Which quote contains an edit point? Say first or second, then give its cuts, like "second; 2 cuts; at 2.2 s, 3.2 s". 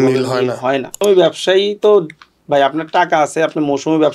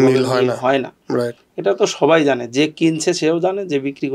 first; 1 cut; at 1.0 s